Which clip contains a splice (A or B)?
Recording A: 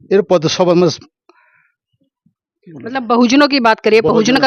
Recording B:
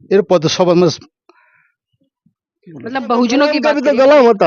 B